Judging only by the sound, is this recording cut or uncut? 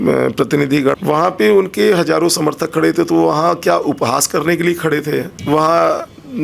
cut